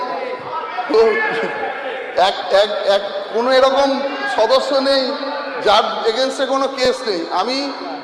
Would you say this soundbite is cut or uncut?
uncut